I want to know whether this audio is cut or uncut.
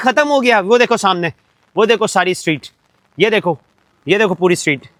uncut